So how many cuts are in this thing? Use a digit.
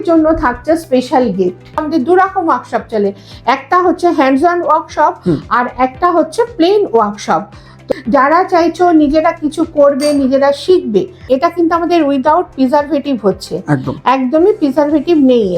3